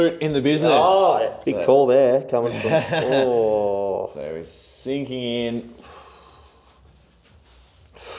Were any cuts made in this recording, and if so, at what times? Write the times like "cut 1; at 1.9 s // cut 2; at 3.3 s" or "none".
cut 1; at 1.4 s